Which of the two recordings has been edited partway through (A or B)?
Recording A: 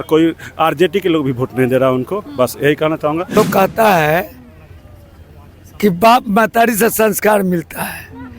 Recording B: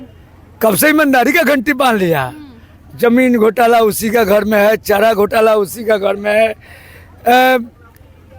A